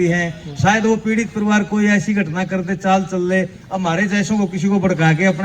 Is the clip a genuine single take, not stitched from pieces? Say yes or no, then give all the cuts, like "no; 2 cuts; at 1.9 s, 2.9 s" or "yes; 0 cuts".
yes; 0 cuts